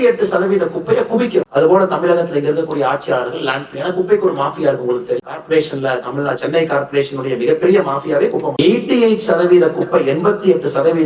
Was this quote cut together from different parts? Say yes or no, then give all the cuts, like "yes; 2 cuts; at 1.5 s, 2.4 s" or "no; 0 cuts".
yes; 2 cuts; at 1.4 s, 8.6 s